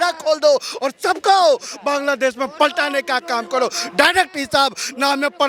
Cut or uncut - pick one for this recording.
uncut